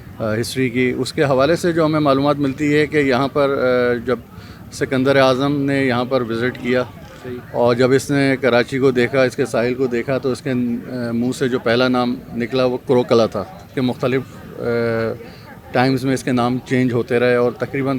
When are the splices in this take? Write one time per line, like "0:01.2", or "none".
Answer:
0:13.7